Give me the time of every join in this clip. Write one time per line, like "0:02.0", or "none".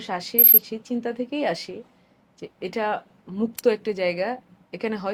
none